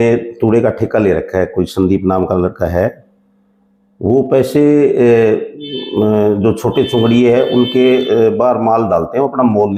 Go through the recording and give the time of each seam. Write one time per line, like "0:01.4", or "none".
none